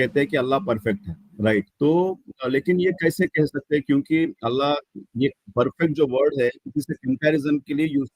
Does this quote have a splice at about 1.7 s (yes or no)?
yes